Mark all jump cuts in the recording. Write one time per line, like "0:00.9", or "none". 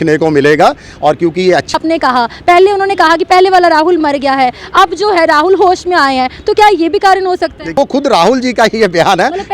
0:01.7
0:07.7